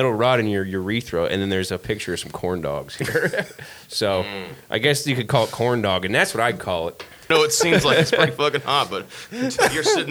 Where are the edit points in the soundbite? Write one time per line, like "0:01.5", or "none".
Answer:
0:07.2